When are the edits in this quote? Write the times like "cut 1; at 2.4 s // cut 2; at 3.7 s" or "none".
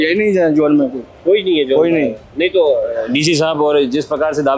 none